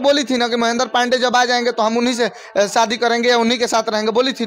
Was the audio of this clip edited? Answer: no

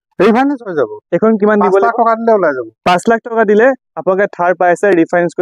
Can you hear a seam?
no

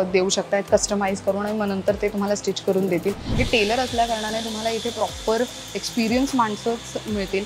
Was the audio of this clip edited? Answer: yes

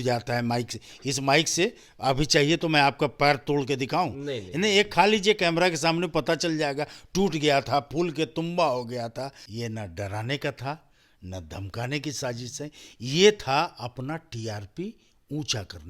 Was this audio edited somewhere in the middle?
yes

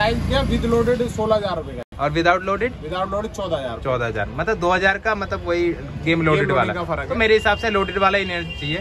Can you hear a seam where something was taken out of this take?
no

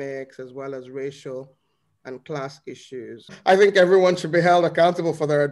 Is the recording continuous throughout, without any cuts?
no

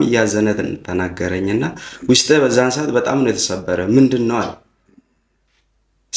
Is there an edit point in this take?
no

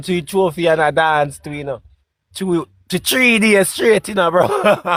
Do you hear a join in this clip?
no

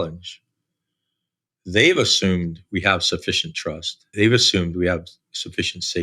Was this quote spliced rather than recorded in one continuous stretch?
yes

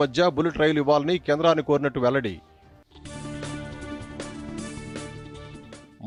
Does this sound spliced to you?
no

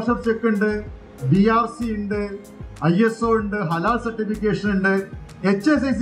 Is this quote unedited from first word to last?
yes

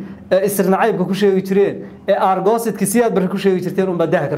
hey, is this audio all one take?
yes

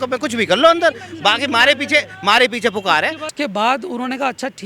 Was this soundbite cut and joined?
yes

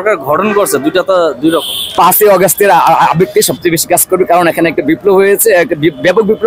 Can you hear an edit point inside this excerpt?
yes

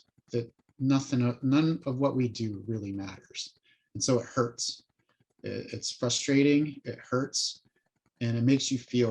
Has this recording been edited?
no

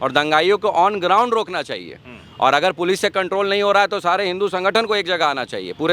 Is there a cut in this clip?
no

